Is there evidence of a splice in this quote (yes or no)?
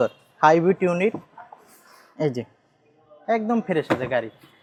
no